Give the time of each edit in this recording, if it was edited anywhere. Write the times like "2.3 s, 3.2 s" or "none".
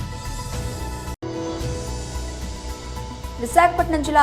1.2 s, 3.4 s